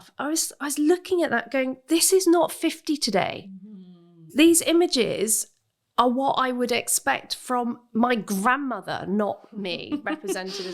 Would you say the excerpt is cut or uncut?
cut